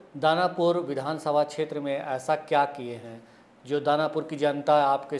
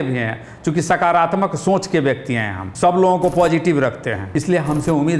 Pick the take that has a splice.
second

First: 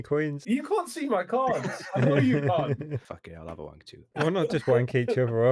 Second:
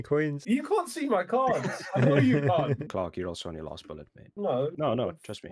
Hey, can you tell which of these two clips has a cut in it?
second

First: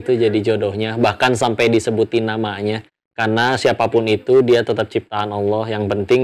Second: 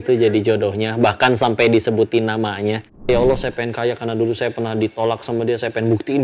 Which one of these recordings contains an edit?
second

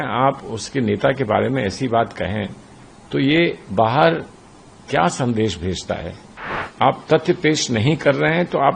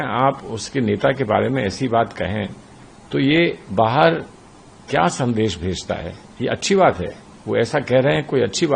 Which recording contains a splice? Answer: first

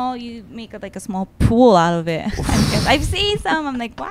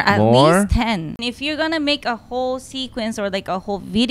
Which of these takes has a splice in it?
second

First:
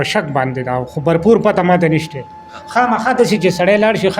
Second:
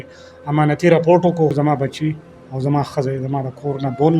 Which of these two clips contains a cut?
second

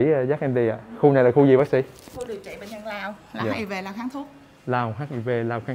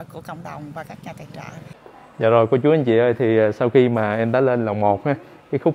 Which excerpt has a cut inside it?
second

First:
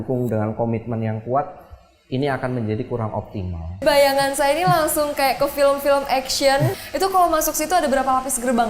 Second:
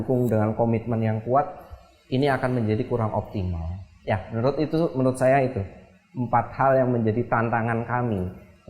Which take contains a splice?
first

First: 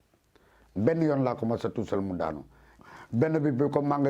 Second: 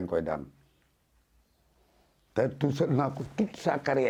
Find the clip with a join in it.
first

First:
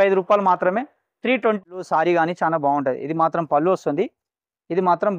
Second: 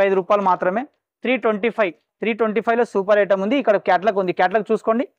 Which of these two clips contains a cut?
first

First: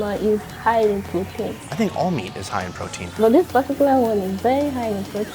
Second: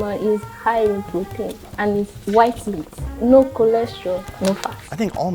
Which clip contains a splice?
first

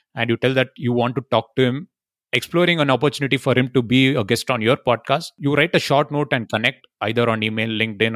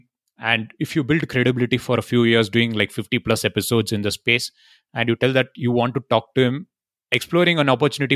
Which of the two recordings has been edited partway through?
first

